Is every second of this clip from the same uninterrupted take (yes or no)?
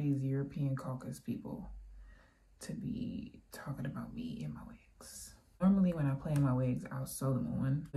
yes